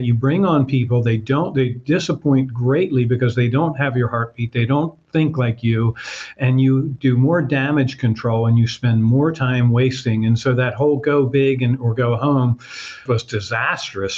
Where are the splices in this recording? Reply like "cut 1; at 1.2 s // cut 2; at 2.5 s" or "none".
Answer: none